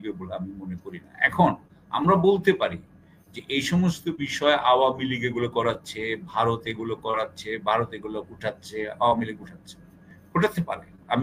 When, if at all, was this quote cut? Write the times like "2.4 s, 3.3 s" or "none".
none